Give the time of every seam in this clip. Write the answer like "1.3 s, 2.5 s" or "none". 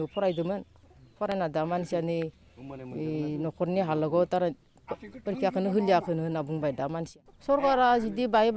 7.1 s